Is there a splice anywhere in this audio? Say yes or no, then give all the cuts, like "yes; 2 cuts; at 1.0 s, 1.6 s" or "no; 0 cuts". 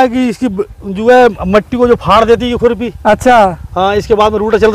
no; 0 cuts